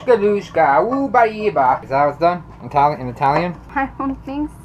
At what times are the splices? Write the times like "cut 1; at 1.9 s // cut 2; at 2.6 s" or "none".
cut 1; at 1.8 s // cut 2; at 3.6 s